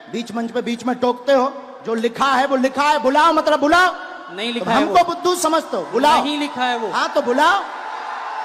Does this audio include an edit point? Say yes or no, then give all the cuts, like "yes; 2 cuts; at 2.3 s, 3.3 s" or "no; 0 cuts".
no; 0 cuts